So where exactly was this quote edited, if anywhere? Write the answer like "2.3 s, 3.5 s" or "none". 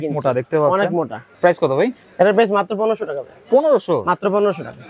1.2 s